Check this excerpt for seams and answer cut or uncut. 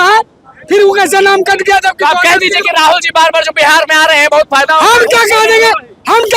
uncut